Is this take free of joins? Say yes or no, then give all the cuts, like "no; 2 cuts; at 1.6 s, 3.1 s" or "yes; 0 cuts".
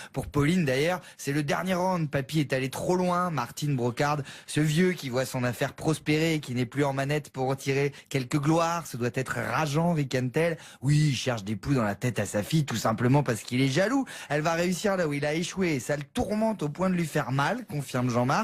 yes; 0 cuts